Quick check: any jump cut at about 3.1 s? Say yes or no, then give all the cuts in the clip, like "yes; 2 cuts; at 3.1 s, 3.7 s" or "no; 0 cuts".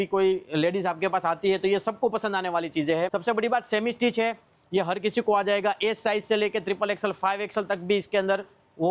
no; 0 cuts